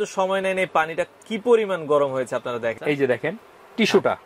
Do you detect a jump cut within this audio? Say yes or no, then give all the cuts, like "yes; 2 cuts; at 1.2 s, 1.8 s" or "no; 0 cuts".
yes; 1 cut; at 2.8 s